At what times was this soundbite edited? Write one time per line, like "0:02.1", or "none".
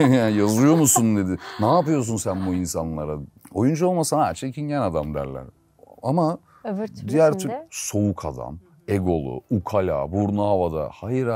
0:03.3